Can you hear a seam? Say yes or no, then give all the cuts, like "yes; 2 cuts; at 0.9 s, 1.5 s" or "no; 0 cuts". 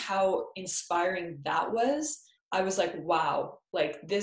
no; 0 cuts